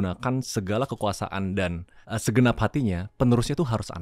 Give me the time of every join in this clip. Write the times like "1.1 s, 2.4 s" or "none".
1.9 s